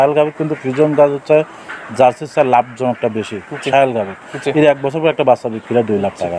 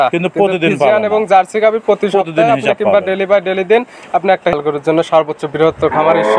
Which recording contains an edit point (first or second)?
second